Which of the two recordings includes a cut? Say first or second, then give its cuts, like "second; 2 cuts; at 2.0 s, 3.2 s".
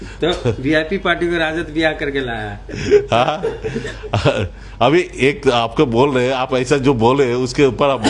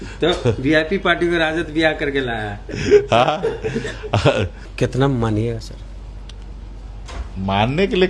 second; 1 cut; at 4.6 s